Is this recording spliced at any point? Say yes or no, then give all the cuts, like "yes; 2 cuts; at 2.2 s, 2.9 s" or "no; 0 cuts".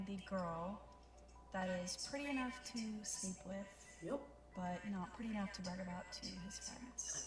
no; 0 cuts